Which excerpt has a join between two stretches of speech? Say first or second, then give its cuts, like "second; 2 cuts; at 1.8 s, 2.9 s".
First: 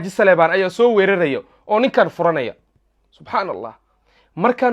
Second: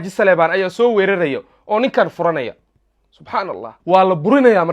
second; 1 cut; at 3.7 s